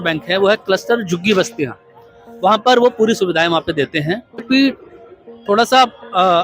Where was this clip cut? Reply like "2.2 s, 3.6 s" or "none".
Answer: 4.4 s